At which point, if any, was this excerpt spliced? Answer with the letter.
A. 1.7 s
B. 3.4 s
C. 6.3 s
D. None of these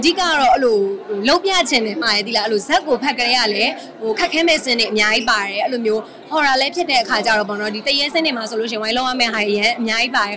D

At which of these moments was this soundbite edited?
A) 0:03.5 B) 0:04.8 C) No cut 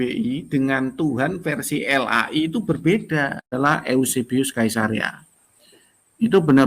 A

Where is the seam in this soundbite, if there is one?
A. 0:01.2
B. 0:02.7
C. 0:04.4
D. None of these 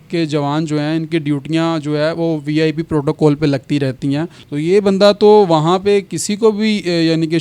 C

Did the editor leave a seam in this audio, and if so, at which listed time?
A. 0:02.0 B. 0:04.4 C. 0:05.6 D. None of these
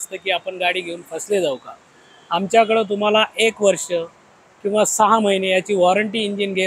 D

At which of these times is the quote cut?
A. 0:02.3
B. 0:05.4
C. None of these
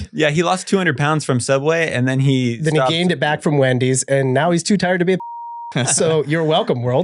C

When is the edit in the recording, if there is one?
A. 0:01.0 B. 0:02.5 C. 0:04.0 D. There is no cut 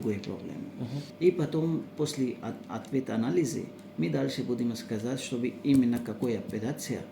A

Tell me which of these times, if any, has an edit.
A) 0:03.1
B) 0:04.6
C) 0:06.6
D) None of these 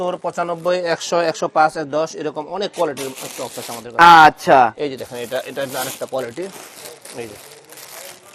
D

